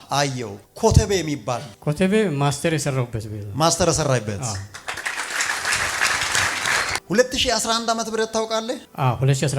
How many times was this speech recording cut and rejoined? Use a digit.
1